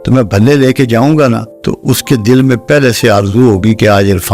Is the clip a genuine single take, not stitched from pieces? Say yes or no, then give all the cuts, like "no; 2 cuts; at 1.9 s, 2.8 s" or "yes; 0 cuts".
no; 1 cut; at 1.5 s